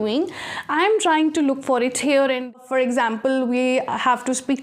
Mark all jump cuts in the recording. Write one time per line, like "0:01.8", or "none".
0:02.6